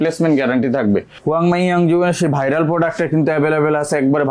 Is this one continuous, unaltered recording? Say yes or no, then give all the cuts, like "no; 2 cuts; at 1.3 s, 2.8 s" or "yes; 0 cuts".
no; 1 cut; at 1.1 s